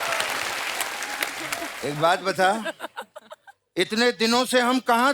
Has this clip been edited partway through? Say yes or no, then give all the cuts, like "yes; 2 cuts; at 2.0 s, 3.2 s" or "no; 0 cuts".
yes; 1 cut; at 1.7 s